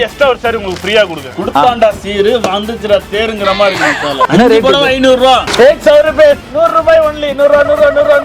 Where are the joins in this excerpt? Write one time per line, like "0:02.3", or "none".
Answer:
0:01.3
0:04.3
0:05.5